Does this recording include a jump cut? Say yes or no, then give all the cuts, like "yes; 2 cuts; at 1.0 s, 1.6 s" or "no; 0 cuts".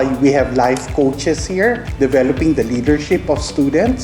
yes; 1 cut; at 1.9 s